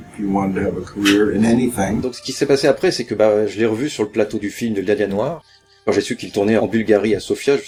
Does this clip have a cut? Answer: no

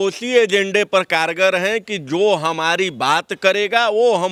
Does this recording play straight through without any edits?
yes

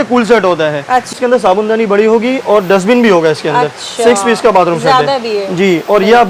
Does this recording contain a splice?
yes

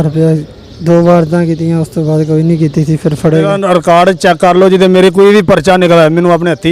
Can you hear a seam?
yes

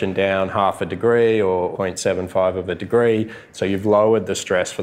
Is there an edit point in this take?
yes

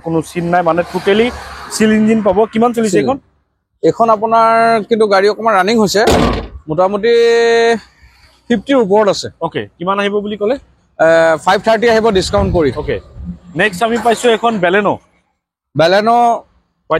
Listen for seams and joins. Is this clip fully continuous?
yes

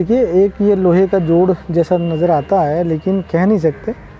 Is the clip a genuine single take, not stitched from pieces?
yes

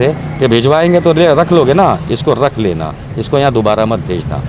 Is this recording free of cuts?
yes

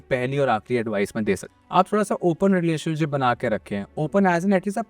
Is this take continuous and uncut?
no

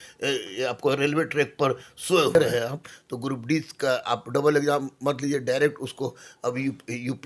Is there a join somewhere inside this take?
yes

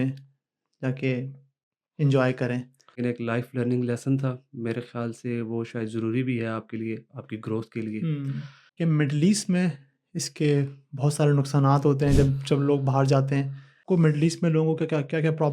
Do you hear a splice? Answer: yes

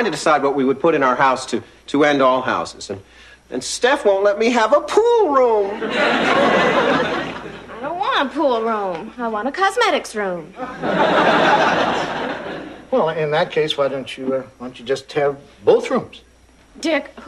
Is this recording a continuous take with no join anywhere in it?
no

